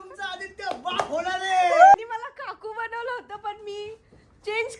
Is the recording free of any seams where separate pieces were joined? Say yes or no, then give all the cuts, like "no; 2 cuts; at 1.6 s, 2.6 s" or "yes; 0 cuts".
no; 1 cut; at 1.9 s